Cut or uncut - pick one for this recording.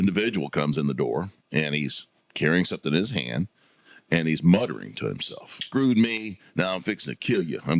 cut